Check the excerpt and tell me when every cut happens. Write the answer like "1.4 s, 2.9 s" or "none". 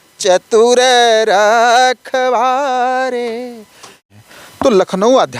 4.1 s

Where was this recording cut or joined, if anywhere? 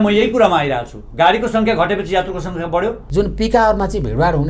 3.0 s

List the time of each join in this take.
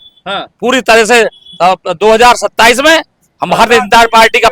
none

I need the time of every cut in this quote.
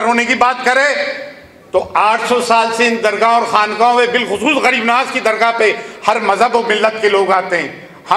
none

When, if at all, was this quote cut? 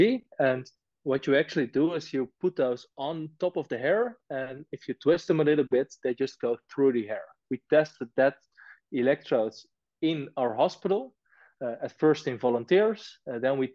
7.5 s

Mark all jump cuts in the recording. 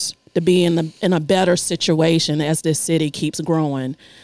none

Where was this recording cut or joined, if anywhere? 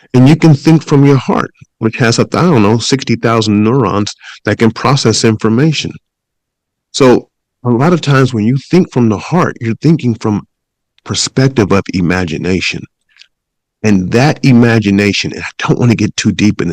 none

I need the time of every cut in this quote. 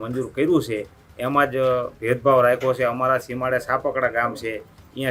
none

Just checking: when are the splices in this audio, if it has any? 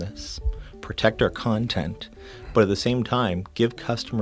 none

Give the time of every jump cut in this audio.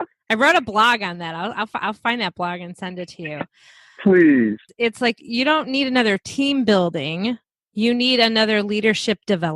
4.7 s

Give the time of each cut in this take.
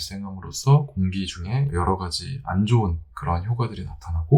1.7 s

